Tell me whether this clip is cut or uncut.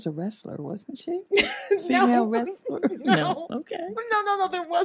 uncut